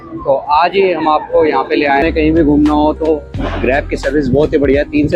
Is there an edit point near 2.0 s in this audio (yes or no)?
yes